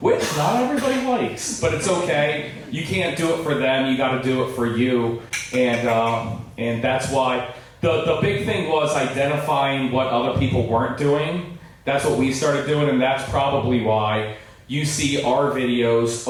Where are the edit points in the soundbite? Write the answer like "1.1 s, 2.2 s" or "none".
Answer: none